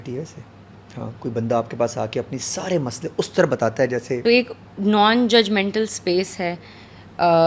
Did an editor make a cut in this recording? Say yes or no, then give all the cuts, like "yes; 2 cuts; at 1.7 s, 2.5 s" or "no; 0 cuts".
no; 0 cuts